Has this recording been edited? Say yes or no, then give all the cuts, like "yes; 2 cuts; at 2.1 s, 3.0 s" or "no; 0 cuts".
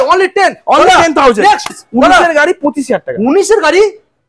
yes; 1 cut; at 1.8 s